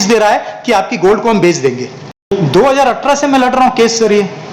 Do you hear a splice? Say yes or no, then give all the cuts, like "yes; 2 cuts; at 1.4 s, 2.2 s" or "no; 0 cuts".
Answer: yes; 1 cut; at 2.3 s